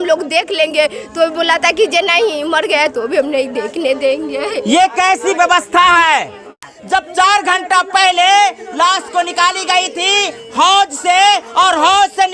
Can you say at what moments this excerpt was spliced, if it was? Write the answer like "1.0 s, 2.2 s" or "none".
6.7 s